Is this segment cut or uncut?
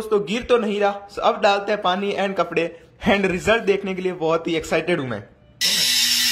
uncut